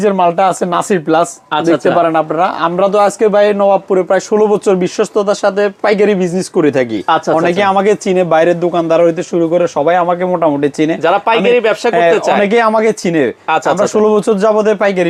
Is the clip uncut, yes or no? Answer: yes